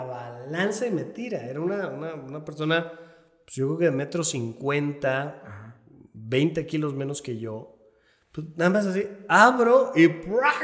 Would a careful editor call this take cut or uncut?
uncut